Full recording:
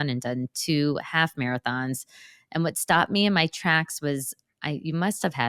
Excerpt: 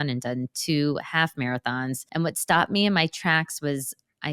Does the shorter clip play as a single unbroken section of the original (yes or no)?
no